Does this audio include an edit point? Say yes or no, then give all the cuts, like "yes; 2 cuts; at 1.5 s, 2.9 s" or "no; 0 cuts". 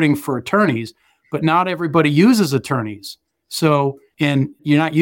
yes; 1 cut; at 4.0 s